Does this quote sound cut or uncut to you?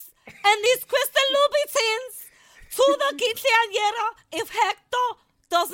uncut